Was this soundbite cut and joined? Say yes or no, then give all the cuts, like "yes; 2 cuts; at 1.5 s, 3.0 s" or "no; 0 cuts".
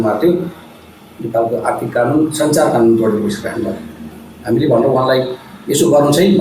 no; 0 cuts